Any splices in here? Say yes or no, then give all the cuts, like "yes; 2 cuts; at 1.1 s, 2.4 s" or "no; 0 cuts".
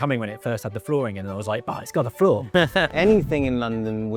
yes; 1 cut; at 2.9 s